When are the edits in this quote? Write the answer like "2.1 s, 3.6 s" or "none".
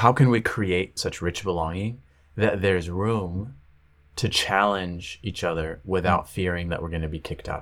0.9 s